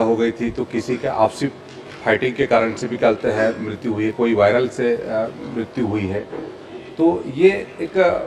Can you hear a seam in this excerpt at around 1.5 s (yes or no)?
no